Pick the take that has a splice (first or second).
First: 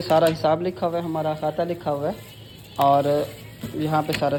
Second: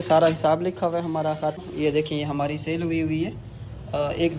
second